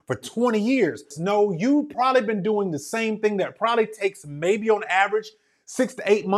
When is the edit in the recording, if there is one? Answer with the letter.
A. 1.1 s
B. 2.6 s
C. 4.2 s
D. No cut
A